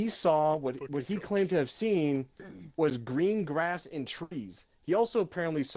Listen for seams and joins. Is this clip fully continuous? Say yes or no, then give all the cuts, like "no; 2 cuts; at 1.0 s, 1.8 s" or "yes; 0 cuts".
yes; 0 cuts